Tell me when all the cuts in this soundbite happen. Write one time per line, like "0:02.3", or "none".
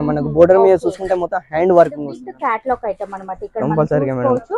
0:02.2